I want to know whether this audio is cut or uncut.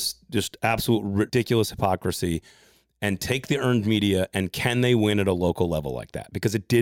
cut